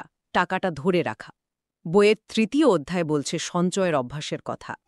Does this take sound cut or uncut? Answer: uncut